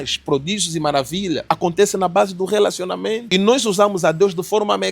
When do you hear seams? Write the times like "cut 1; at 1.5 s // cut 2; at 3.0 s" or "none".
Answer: cut 1; at 1.4 s // cut 2; at 3.2 s